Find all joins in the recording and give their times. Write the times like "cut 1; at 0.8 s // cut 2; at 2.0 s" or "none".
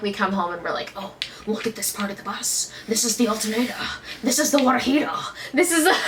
none